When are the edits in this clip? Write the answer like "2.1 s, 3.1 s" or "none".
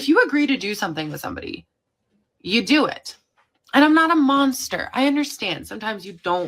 none